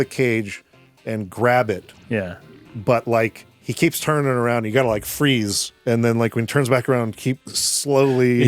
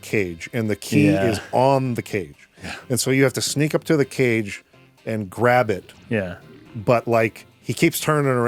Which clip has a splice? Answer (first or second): first